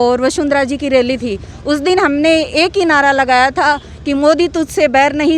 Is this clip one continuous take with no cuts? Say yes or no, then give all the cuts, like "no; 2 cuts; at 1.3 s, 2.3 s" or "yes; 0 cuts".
yes; 0 cuts